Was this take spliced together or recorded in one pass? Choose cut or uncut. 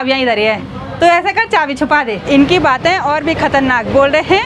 cut